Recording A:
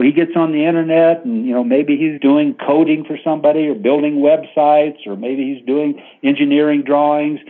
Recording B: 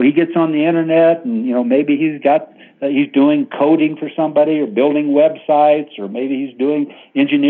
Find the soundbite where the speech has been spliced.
A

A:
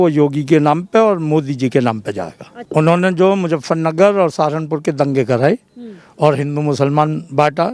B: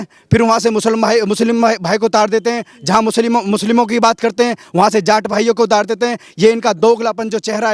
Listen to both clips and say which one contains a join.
A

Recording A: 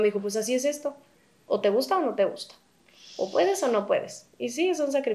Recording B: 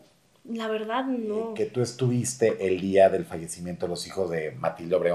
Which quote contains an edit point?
B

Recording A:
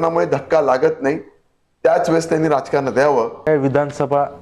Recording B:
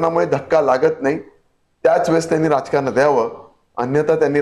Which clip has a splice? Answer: A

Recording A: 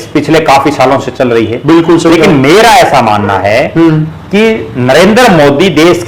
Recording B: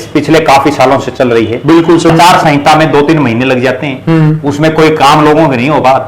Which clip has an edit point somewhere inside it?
B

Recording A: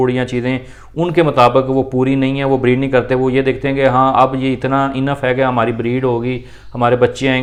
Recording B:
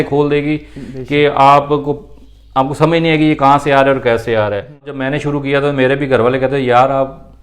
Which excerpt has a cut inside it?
B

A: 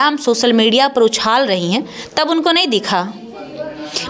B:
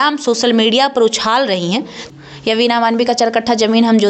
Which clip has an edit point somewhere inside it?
B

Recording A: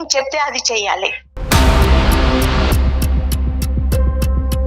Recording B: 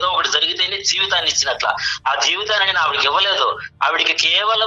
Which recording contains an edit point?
A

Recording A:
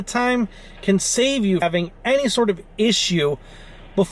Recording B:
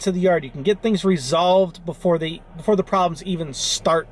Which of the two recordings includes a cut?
A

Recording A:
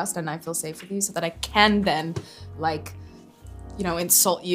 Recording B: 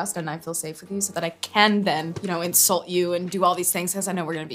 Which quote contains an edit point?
B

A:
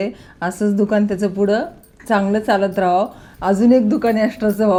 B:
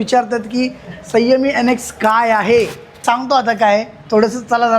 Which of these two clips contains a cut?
B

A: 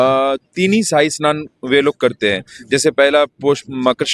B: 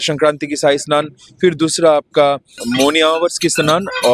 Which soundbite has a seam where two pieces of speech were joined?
B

